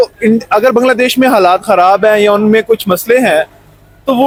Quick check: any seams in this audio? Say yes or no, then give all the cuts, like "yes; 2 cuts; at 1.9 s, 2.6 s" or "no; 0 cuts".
no; 0 cuts